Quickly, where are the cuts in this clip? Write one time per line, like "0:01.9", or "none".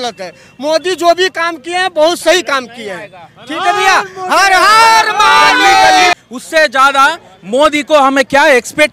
0:06.1